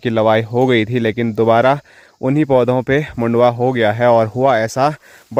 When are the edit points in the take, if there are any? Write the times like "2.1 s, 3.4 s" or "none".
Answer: none